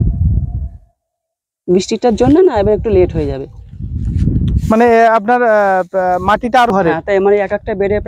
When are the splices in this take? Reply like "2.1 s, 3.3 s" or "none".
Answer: 6.7 s

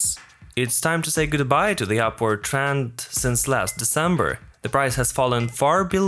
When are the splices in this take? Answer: none

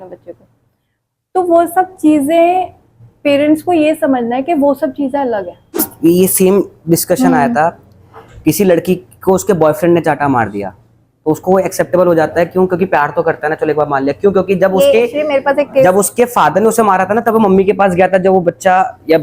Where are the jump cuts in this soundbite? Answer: 5.8 s

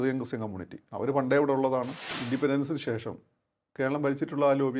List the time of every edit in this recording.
2.1 s

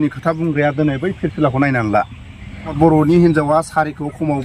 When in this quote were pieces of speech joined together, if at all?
2.8 s

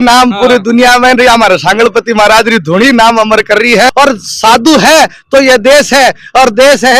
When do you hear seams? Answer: 3.9 s

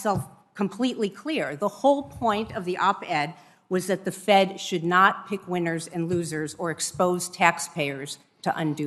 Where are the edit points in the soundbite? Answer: none

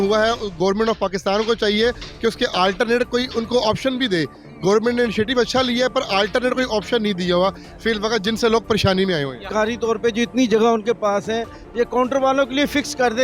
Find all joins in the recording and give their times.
9.5 s

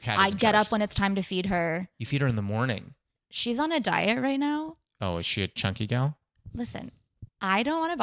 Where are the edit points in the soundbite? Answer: 2.0 s

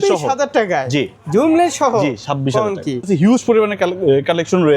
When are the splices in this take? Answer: 1.2 s, 3.0 s

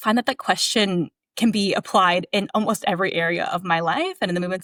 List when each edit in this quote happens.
none

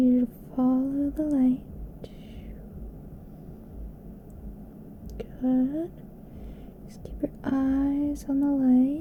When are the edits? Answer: none

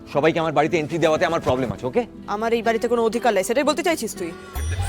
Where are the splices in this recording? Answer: 2.2 s

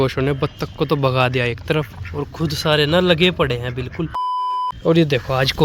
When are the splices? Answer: 4.5 s

